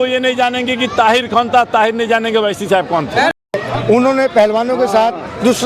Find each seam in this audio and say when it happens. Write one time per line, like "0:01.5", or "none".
0:03.6